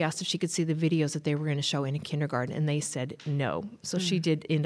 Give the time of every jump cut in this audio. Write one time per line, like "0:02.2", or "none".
none

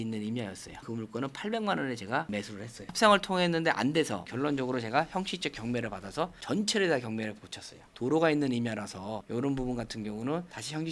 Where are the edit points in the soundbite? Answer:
none

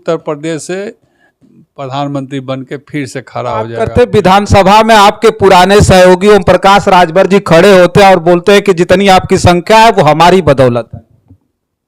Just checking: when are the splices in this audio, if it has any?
0:03.9

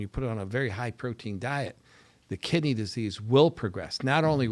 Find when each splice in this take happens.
none

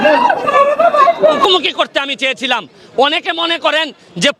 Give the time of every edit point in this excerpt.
0:01.4

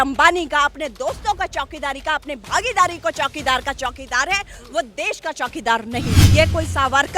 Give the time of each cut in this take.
0:06.2

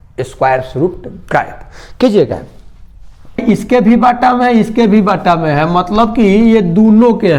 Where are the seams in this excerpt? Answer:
0:03.4

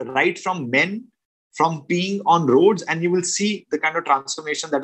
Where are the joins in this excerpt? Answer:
none

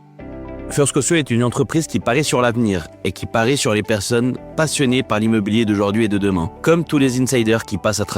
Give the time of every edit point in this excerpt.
0:06.5

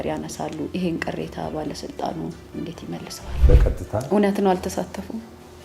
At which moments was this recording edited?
0:03.4

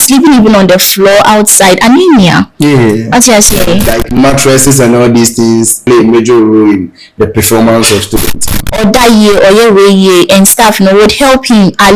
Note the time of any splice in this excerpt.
0:03.9
0:05.8
0:08.6

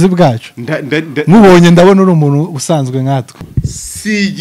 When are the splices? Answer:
0:03.5

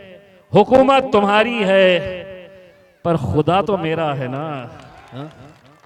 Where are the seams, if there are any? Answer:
0:05.0

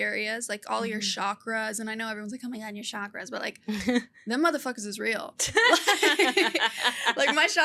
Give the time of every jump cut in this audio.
none

